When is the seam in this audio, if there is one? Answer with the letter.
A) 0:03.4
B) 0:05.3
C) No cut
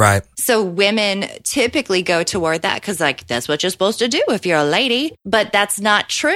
B